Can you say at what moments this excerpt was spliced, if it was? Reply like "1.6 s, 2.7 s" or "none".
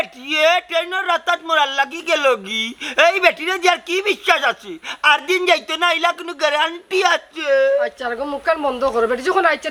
none